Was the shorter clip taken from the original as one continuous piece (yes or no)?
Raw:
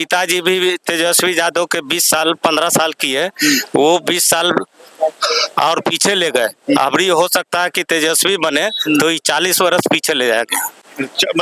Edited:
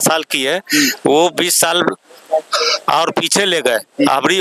yes